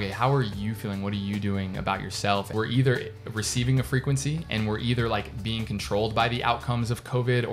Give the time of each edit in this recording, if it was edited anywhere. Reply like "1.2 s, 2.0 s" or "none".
2.5 s